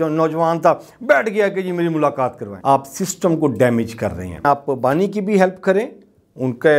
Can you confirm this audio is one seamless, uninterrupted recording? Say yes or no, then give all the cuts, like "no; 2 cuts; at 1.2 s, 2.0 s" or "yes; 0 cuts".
no; 2 cuts; at 2.5 s, 4.4 s